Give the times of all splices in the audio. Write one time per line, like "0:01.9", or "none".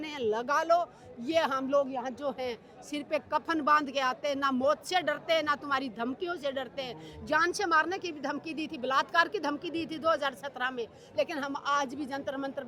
none